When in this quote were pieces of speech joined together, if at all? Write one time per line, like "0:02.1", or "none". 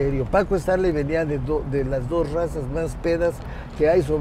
none